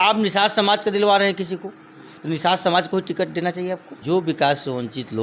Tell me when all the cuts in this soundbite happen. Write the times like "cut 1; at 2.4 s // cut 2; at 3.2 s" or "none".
cut 1; at 3.9 s